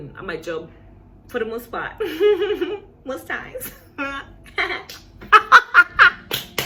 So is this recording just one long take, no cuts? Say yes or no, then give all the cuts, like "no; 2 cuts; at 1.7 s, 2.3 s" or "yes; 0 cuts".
yes; 0 cuts